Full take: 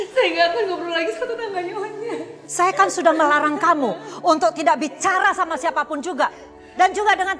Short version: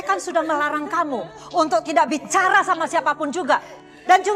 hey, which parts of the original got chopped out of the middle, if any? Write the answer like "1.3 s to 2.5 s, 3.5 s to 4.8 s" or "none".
none

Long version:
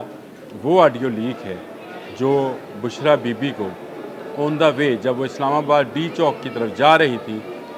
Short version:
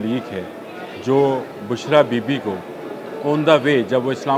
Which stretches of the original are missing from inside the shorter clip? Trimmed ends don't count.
none

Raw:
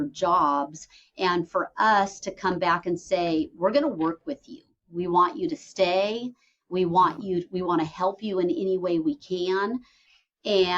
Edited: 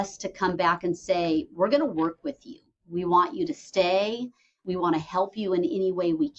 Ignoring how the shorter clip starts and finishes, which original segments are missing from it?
6.7 s to 7.5 s

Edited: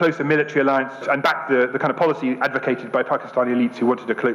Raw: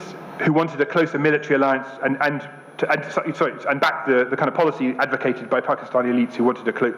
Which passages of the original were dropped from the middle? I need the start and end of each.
1.9 s to 3.6 s

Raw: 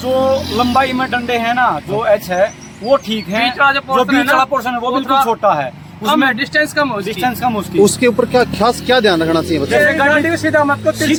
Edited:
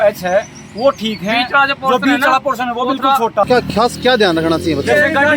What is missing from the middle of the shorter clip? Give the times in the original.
5.5 s to 8.3 s

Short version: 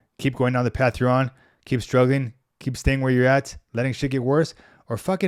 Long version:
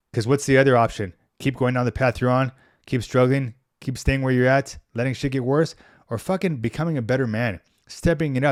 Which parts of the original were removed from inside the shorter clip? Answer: none

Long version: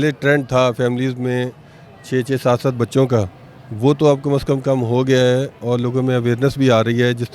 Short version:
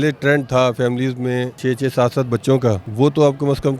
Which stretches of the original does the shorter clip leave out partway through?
1.5 s to 2.0 s, 3.3 s to 3.7 s

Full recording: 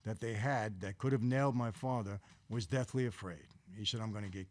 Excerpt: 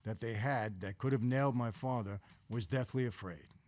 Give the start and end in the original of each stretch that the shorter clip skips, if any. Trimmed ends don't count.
none

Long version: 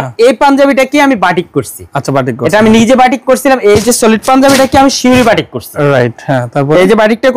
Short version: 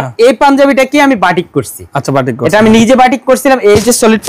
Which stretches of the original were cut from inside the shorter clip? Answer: none

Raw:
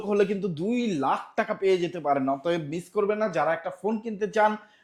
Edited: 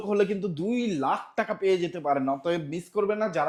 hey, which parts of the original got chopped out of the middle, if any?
none

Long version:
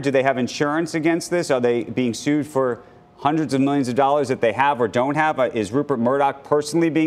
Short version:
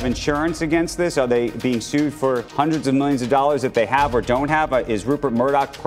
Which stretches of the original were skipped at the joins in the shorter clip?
2.8 s to 3.1 s

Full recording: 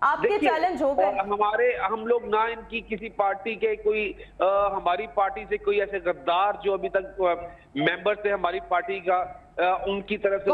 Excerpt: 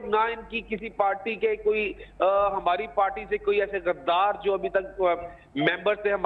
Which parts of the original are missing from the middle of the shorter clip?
none

